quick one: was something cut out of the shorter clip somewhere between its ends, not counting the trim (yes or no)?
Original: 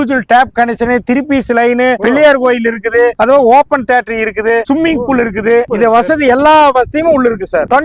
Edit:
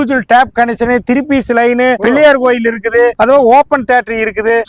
no